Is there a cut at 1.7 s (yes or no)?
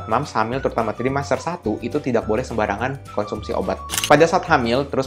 no